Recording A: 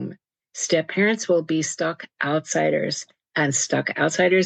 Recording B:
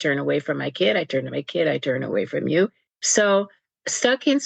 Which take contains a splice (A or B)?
B